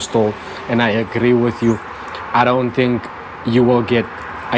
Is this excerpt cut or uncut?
uncut